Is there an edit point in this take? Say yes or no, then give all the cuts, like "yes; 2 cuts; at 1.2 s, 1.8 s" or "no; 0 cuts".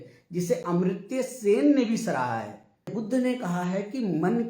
yes; 1 cut; at 2.9 s